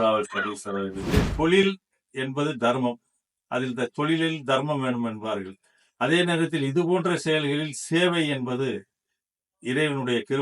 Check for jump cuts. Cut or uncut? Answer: cut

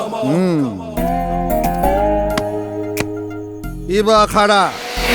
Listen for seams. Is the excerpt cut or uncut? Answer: uncut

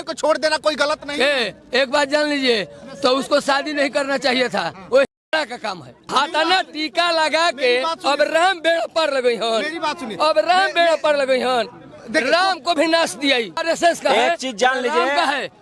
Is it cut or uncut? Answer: cut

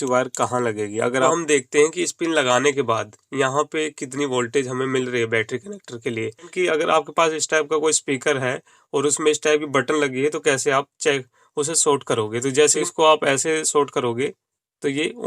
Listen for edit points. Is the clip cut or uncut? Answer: cut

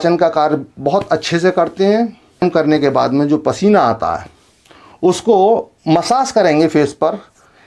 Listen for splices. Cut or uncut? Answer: cut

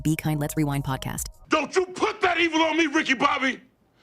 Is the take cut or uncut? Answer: cut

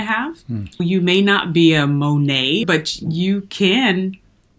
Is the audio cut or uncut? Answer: cut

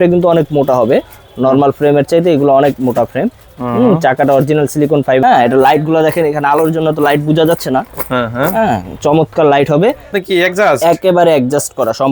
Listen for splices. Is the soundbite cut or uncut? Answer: cut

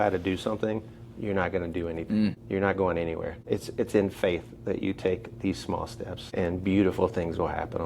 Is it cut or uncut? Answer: cut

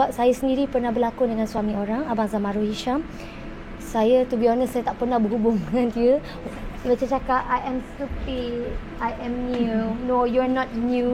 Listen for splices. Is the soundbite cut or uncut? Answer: cut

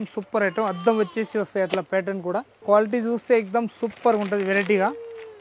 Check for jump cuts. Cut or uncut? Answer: cut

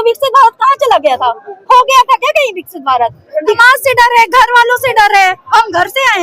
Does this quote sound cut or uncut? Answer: cut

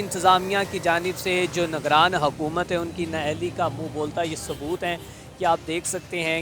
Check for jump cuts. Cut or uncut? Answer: uncut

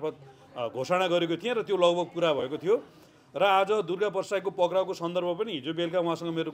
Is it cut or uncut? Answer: uncut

